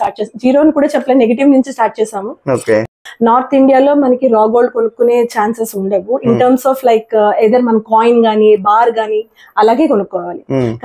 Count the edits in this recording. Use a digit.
1